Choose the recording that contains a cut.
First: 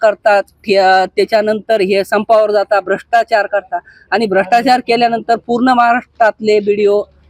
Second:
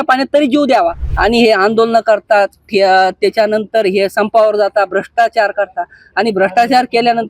second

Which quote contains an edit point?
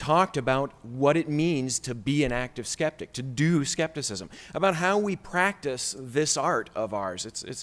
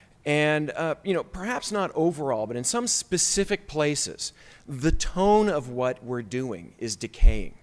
first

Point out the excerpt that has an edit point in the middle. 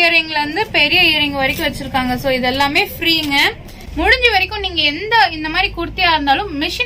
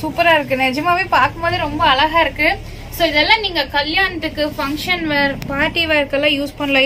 first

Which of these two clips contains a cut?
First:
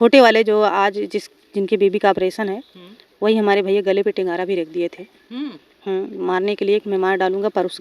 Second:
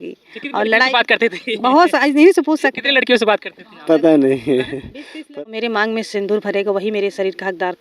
second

